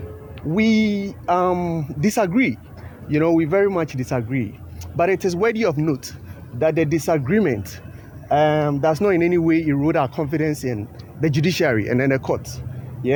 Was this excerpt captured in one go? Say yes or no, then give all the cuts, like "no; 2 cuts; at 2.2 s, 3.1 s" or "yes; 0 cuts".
yes; 0 cuts